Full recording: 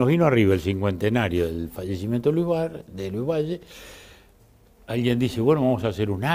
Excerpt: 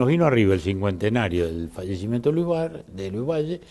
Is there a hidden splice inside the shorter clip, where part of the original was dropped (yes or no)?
no